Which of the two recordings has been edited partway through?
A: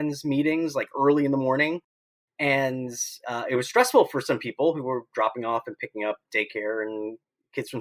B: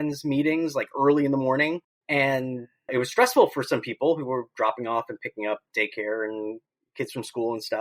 B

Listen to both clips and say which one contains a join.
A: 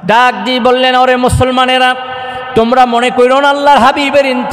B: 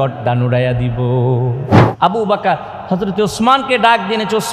B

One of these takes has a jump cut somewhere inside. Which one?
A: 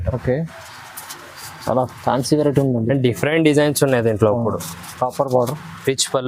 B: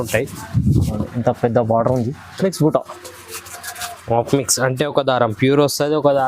B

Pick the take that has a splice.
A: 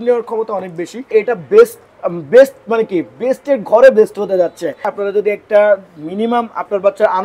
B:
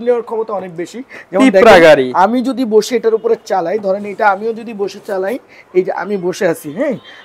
A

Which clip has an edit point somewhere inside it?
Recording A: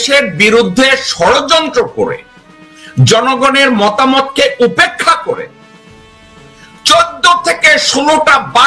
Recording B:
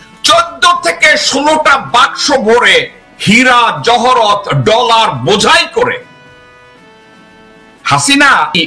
B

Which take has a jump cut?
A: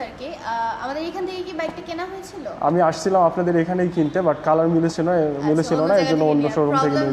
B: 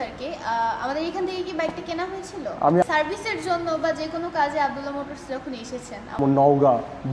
B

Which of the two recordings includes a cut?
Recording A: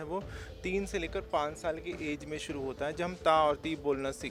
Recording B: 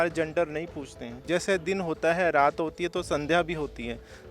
B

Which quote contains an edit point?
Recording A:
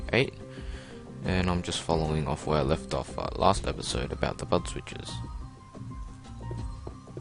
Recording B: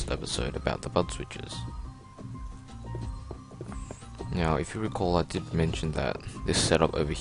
B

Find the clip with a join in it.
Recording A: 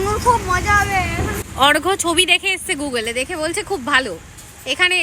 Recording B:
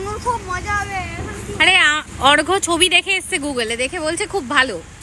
A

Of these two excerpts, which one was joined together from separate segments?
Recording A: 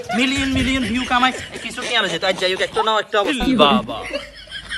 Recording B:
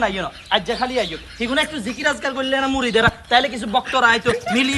A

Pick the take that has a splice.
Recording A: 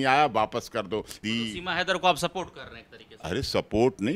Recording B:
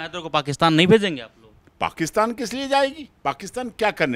A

